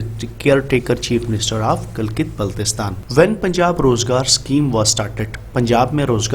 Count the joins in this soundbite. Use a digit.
1